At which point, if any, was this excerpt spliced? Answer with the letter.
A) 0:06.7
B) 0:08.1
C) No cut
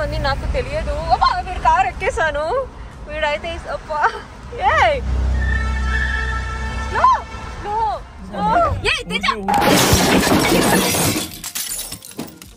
C